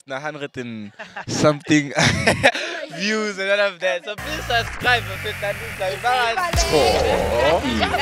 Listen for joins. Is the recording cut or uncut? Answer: uncut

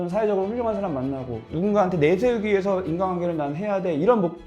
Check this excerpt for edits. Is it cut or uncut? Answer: cut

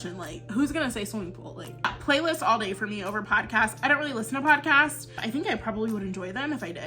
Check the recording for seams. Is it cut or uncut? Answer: cut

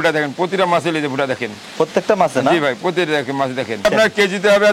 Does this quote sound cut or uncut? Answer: cut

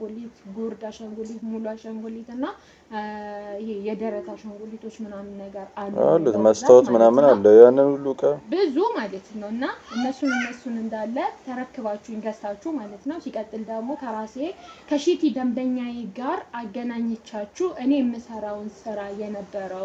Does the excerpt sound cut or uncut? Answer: uncut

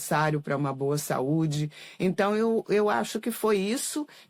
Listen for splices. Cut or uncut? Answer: uncut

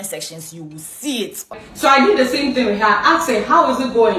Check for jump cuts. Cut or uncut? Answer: cut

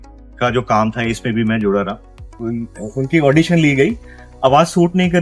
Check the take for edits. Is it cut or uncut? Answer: cut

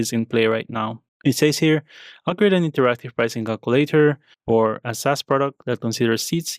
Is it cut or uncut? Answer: cut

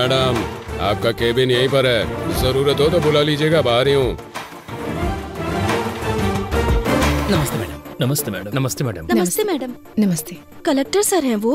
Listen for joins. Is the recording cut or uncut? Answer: uncut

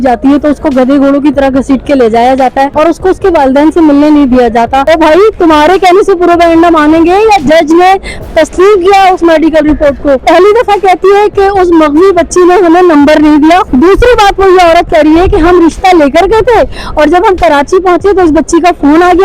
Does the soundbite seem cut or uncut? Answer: cut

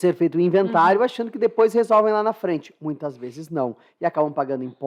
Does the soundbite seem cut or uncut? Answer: uncut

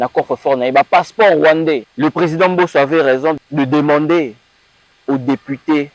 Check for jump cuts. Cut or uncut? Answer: cut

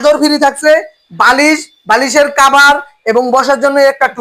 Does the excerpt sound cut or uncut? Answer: uncut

